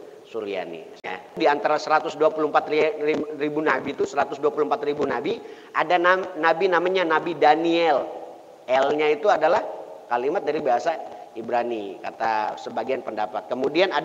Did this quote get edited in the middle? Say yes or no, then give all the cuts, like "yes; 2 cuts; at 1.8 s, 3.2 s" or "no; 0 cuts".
yes; 1 cut; at 1.4 s